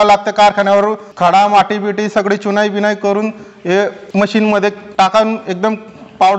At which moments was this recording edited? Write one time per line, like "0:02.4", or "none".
0:01.1
0:04.0
0:04.8